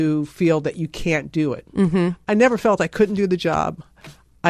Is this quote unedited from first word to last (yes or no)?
yes